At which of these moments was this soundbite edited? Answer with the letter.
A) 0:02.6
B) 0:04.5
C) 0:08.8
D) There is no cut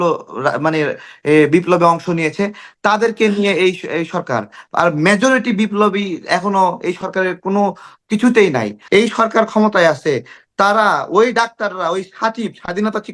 C